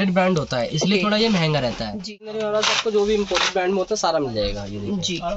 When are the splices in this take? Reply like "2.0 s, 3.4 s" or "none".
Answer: 1.9 s